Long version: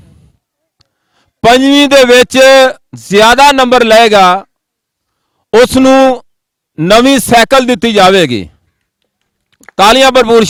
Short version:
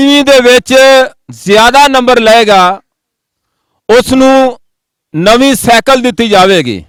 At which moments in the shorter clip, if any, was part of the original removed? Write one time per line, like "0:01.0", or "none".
none